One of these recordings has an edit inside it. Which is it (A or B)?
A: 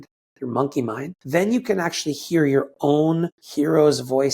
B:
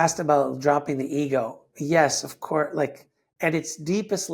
A